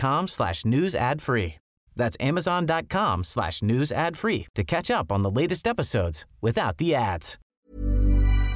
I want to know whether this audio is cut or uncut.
cut